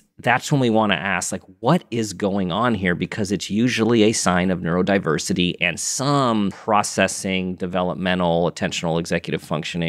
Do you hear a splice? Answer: no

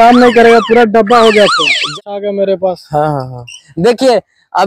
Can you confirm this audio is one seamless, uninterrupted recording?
no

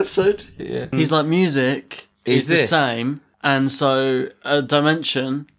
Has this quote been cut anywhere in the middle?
yes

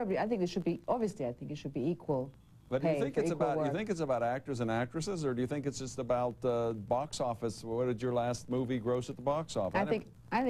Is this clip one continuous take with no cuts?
yes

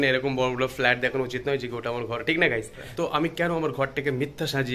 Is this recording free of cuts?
no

